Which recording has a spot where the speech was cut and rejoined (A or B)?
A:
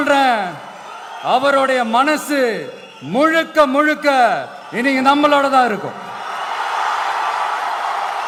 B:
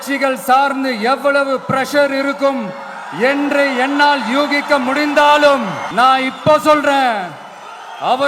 B